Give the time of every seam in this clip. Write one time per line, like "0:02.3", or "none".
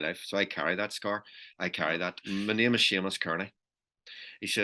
0:02.2